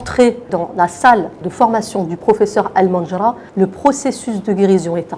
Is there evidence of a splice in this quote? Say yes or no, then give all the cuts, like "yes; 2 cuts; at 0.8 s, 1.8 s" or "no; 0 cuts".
no; 0 cuts